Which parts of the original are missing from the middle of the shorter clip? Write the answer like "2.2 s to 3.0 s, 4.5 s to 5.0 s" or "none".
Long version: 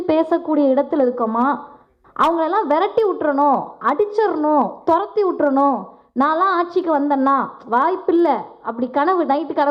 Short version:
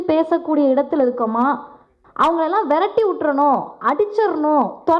none